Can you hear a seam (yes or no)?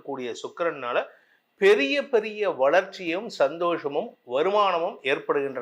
no